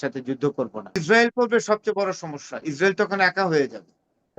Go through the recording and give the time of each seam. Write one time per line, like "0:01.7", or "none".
0:01.0